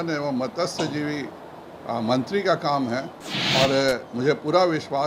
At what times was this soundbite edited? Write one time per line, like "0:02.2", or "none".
none